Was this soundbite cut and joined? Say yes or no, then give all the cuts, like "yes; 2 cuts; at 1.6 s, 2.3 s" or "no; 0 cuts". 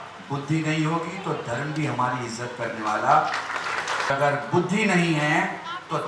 yes; 1 cut; at 4.1 s